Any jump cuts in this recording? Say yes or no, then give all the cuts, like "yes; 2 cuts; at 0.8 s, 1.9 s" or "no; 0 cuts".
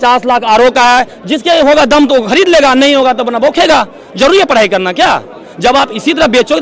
no; 0 cuts